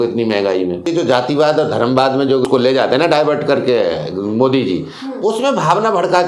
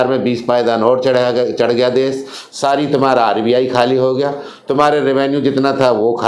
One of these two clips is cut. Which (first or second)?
first